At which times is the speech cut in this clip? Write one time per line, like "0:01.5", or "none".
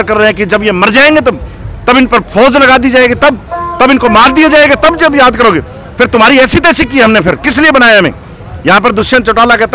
none